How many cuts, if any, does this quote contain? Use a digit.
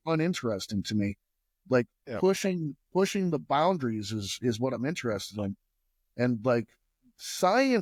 0